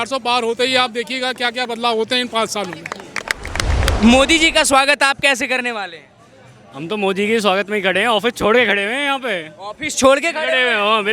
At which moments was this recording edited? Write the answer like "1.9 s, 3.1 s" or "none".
3.9 s

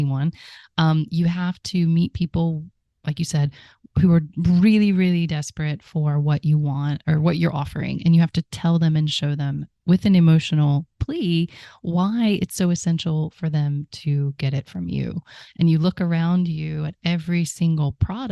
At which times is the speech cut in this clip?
4.1 s, 15.4 s

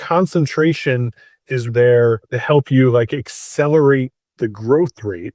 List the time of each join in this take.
1.7 s, 2.3 s

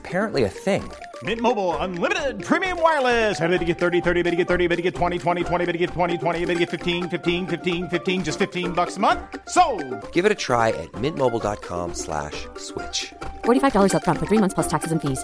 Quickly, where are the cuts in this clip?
none

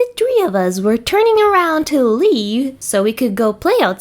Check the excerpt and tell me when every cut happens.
2.8 s

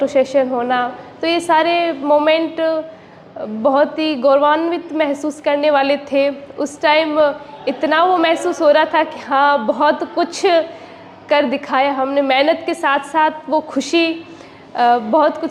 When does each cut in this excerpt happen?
none

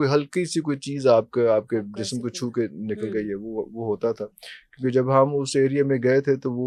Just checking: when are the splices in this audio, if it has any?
none

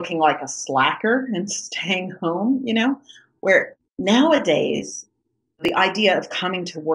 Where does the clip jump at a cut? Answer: 3.8 s, 5.7 s

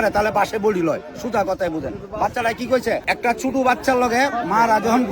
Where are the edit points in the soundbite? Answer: 3.1 s

